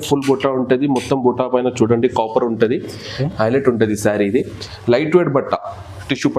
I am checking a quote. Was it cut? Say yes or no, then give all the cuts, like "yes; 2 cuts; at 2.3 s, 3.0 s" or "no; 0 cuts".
no; 0 cuts